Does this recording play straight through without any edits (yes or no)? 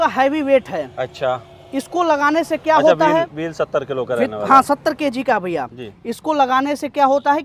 yes